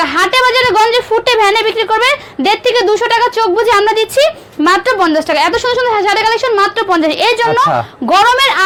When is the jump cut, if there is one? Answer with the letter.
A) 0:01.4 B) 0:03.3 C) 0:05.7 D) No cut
D